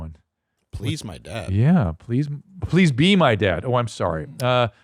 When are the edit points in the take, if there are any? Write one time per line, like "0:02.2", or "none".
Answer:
none